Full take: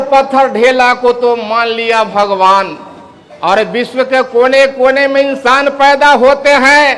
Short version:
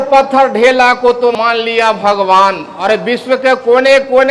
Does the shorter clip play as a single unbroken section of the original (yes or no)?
no